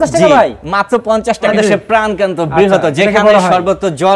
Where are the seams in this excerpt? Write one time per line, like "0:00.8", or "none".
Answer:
0:01.5